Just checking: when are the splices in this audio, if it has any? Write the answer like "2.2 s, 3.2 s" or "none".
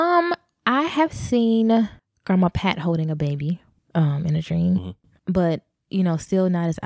5.1 s